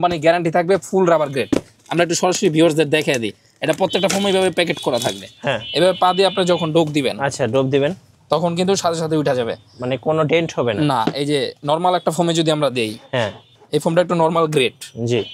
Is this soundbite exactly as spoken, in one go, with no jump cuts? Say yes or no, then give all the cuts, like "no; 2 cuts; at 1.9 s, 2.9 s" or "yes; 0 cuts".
yes; 0 cuts